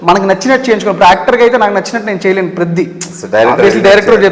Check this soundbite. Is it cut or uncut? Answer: uncut